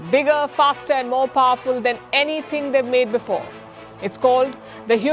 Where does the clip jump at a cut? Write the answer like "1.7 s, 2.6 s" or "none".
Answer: none